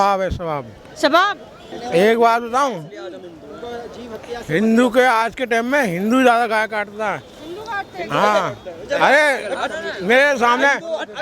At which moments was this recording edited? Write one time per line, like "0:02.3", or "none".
0:01.7